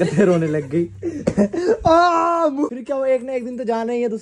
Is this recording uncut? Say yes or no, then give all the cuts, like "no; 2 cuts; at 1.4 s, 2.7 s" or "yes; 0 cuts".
no; 1 cut; at 2.8 s